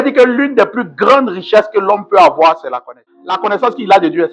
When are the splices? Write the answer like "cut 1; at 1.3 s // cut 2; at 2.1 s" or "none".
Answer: cut 1; at 3.4 s